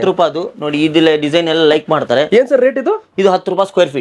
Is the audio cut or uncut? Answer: uncut